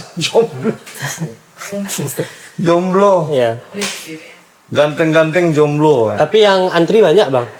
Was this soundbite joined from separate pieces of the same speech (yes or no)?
no